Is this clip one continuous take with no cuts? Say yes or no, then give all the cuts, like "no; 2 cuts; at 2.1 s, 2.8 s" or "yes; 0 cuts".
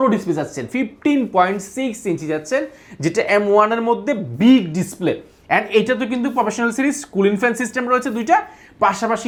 yes; 0 cuts